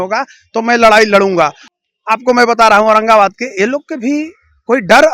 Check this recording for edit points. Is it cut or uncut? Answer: cut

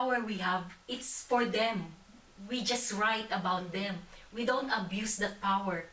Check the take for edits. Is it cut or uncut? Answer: uncut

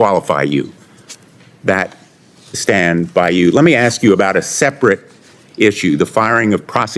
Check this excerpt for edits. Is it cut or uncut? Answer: cut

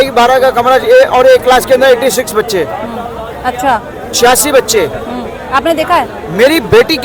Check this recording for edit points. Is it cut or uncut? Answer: uncut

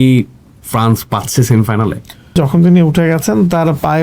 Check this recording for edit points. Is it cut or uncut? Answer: cut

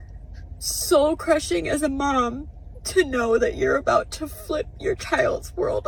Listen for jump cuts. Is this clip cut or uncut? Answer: uncut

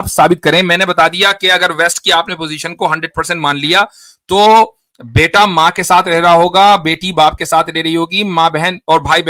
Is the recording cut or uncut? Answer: uncut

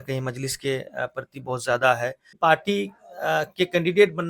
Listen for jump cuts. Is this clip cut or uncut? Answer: cut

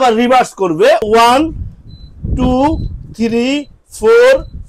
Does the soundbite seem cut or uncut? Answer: cut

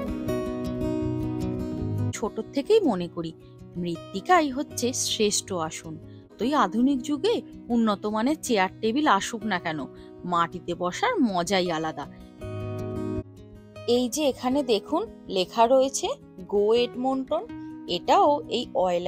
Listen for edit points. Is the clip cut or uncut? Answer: cut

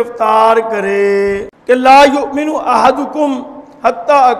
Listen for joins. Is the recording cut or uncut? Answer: cut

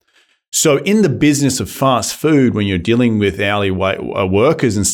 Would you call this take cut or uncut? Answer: uncut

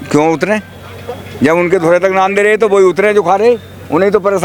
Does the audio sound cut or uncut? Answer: uncut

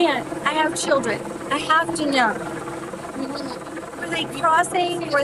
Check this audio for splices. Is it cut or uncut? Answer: uncut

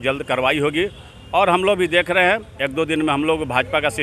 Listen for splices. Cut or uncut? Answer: uncut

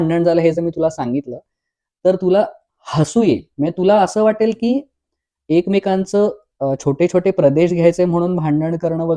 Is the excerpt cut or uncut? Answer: uncut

